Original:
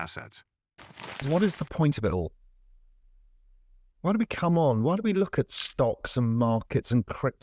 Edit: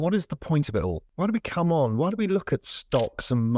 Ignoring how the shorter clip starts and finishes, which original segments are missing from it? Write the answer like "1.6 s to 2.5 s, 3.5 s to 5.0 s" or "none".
2.4 s to 3.9 s